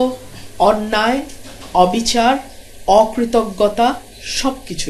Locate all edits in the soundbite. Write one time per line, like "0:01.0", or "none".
none

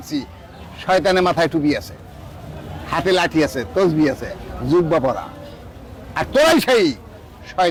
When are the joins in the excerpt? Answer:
none

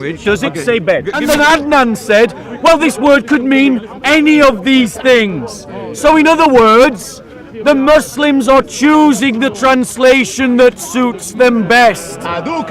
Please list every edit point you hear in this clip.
0:01.1

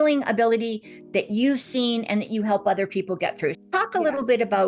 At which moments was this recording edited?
0:03.6

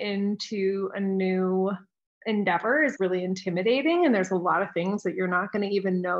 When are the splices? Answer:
none

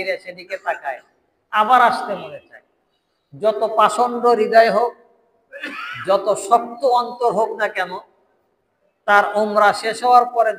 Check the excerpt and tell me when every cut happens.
none

